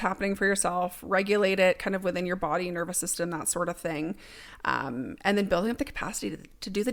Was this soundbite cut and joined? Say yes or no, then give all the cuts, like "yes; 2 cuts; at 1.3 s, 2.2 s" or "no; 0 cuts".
no; 0 cuts